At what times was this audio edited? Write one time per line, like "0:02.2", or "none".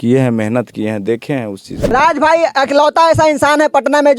0:01.7

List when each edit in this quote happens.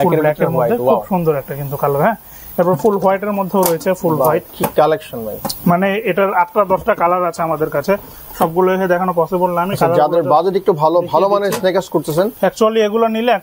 none

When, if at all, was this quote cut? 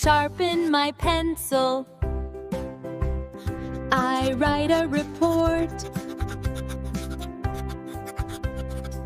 0:03.2

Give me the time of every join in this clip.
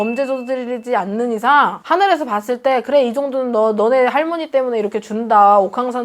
0:01.8

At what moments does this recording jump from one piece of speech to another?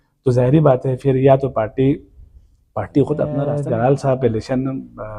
0:03.5

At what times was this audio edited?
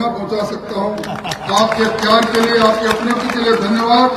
none

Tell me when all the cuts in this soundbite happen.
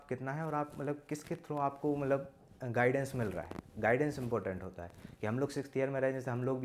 none

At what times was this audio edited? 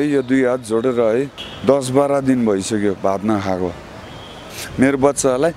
0:01.4
0:04.6

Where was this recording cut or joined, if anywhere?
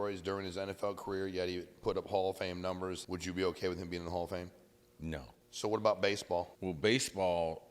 0:03.0
0:05.3
0:06.5

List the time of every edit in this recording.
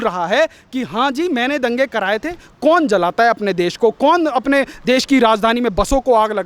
0:02.4

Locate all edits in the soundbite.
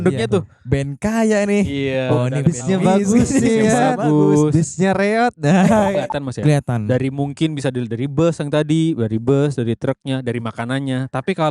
0:05.9

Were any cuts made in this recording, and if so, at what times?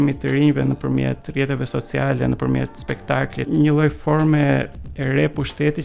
0:03.5

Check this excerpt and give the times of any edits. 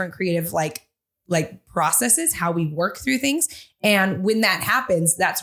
none

